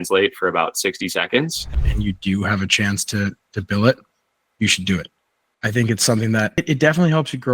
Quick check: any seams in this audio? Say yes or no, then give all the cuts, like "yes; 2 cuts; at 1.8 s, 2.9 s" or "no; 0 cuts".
yes; 2 cuts; at 1.8 s, 6.6 s